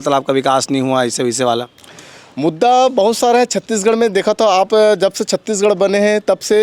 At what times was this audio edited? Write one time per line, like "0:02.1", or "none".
none